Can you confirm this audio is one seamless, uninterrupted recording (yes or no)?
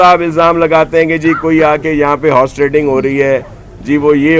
yes